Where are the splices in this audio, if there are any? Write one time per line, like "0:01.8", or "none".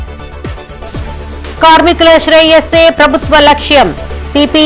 0:01.2